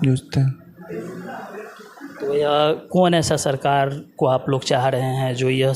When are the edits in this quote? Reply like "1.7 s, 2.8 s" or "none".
none